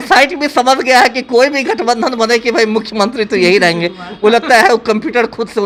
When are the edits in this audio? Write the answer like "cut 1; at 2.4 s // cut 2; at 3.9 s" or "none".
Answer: none